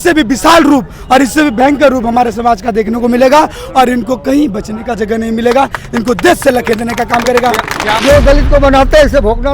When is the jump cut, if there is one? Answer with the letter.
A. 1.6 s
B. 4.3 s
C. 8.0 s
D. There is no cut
C